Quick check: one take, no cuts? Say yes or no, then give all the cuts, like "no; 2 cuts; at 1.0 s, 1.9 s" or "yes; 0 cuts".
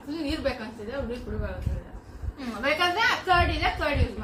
yes; 0 cuts